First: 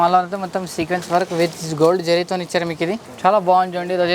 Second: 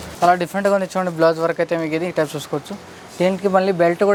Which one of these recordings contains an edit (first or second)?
first